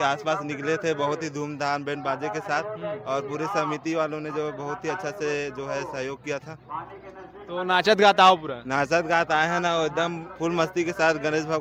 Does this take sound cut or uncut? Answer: uncut